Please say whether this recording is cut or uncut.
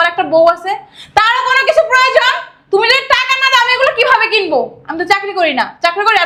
uncut